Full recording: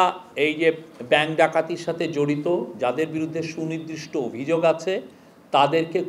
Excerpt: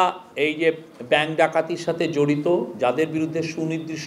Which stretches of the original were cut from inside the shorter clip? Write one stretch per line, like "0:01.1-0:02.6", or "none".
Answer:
none